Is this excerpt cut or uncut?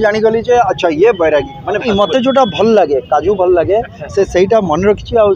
cut